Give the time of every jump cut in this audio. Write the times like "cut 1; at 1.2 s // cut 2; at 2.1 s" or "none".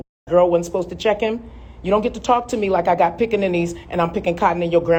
none